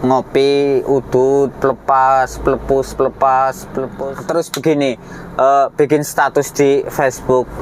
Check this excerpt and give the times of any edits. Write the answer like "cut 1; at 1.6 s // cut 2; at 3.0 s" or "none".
cut 1; at 3.9 s